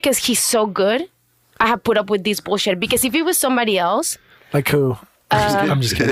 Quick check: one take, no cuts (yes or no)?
yes